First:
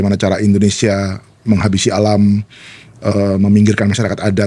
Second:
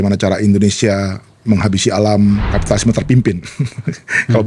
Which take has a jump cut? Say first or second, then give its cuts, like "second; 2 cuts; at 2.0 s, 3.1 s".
second; 1 cut; at 2.5 s